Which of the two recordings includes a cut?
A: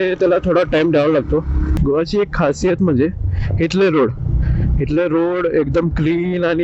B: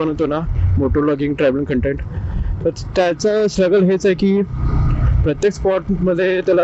A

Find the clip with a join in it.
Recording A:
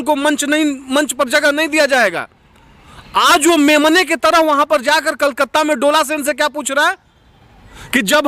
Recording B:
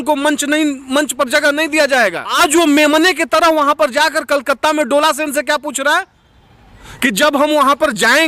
B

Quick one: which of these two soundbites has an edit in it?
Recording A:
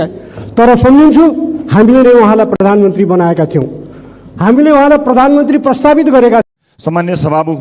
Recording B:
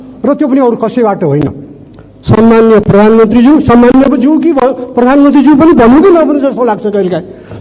A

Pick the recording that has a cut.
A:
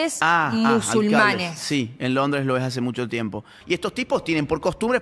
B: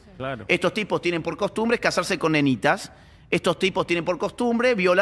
A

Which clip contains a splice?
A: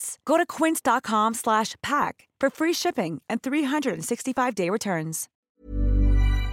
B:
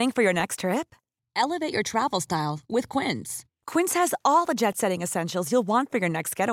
A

